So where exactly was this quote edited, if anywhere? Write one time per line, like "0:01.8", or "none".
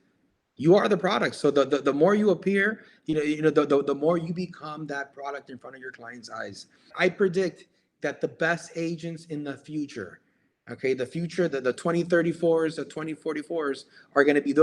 0:06.9
0:11.8